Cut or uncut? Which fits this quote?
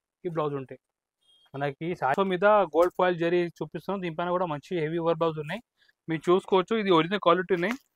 cut